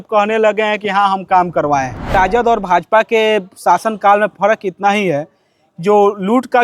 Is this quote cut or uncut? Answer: cut